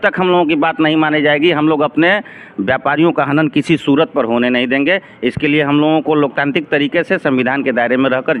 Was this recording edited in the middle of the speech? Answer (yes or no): no